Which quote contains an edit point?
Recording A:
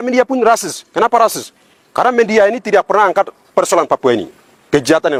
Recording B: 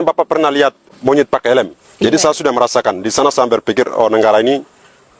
B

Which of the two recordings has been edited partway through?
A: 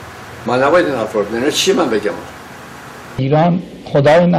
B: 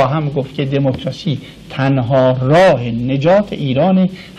A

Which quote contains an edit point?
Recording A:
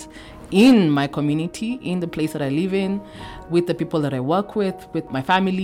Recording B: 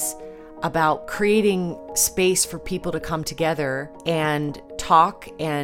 B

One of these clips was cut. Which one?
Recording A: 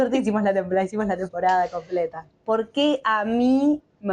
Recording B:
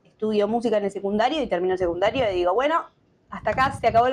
A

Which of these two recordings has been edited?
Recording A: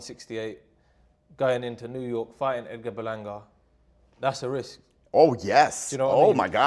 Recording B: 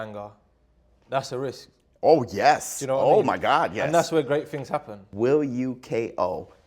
B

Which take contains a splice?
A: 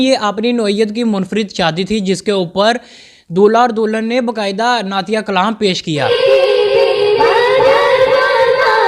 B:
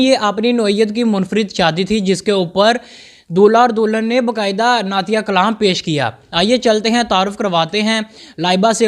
A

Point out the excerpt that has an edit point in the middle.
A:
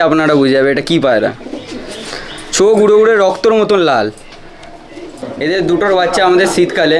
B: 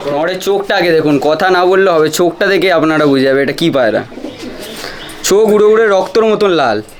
A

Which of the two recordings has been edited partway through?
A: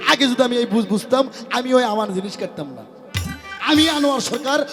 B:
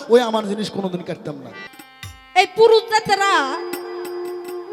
B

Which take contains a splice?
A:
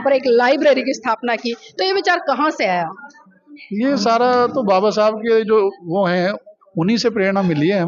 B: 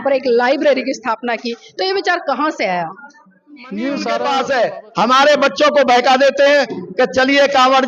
B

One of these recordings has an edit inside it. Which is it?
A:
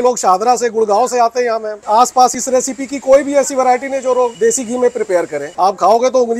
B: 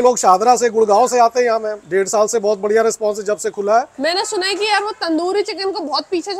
A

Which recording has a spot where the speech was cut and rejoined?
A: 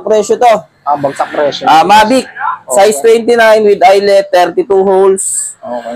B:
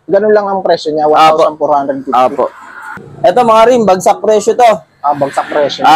B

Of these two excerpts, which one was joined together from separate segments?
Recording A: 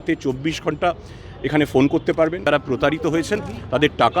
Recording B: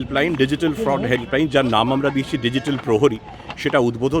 A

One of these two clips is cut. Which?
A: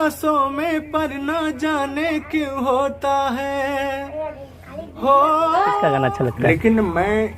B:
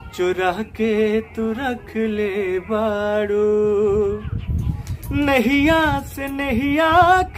A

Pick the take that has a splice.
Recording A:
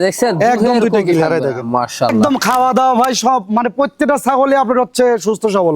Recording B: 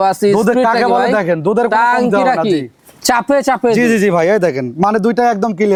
A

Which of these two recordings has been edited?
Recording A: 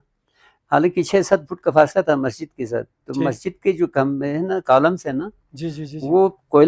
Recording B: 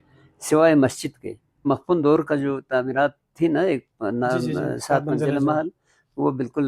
B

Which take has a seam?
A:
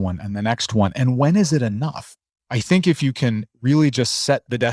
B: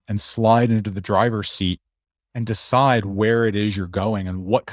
A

